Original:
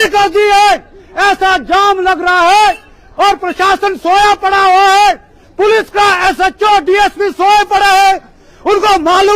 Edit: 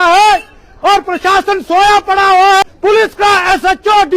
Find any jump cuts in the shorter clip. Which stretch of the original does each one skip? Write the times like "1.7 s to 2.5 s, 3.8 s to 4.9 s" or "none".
5.0 s to 5.4 s